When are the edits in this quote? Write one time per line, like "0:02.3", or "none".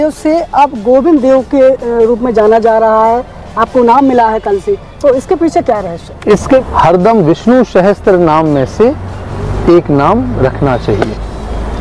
0:06.6